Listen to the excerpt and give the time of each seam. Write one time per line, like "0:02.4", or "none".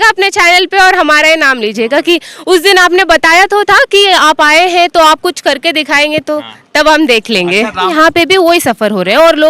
0:07.9